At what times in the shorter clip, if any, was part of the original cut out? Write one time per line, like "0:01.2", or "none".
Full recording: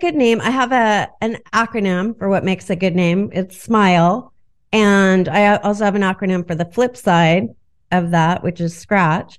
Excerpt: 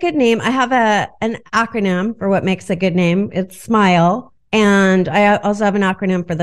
0:04.3